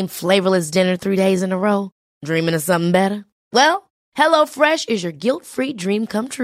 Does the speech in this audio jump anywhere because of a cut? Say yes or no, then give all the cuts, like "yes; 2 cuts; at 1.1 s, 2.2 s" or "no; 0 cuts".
no; 0 cuts